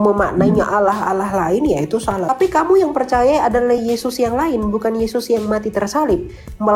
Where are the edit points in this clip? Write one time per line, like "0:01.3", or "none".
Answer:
0:02.3